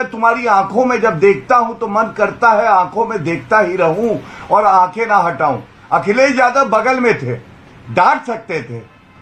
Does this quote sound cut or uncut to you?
uncut